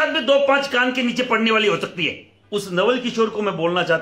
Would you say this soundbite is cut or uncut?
cut